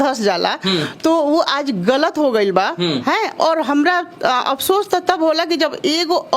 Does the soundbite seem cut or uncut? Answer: uncut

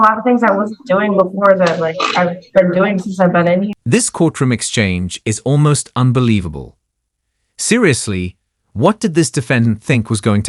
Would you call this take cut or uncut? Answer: uncut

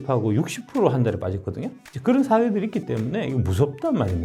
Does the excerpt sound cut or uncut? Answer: uncut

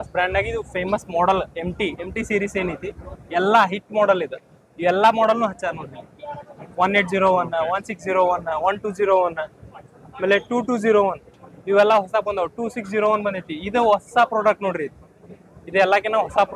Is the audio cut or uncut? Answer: uncut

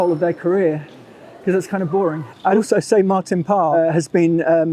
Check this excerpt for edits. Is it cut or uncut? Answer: cut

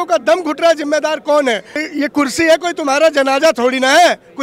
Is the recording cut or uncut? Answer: cut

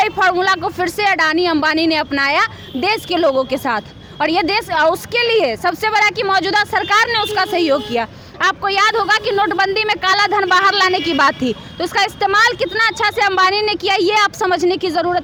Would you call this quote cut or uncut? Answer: uncut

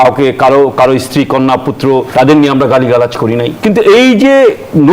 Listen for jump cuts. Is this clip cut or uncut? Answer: cut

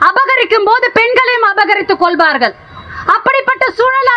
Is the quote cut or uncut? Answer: cut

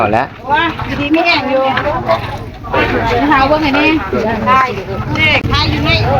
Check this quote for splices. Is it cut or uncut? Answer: uncut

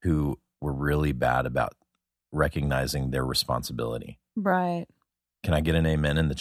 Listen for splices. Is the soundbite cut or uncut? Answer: cut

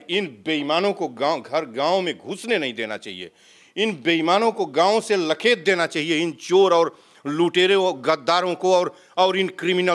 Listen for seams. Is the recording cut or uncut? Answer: uncut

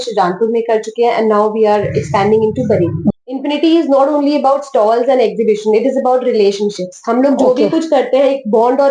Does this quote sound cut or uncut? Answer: cut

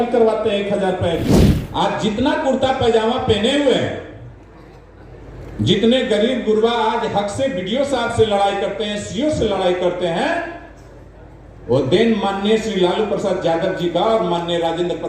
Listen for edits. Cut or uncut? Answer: cut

